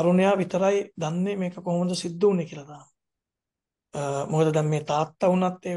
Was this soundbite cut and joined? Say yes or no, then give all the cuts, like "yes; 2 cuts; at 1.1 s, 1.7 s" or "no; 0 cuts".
no; 0 cuts